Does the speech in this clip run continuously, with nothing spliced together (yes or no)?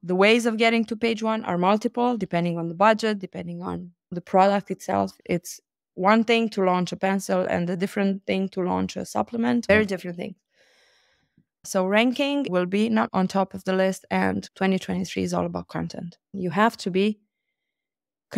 no